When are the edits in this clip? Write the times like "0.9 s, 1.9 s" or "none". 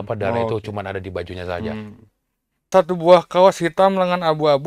2.7 s